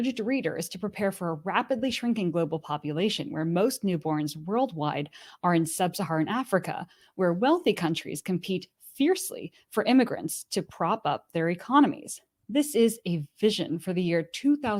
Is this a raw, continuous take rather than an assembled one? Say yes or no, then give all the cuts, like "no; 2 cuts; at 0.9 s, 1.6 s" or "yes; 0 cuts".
yes; 0 cuts